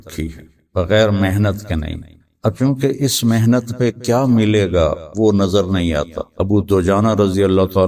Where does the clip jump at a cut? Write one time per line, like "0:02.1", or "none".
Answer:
0:06.2